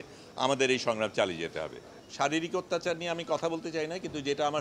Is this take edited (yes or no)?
yes